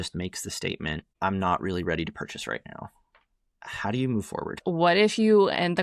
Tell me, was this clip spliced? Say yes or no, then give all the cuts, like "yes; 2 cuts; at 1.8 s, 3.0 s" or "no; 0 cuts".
yes; 2 cuts; at 1.1 s, 4.6 s